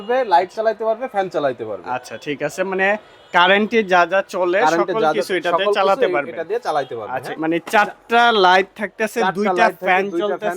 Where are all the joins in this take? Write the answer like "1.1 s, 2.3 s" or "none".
7.3 s